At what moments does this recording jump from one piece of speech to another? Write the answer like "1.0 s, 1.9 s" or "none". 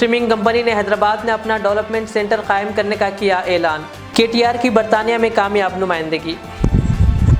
none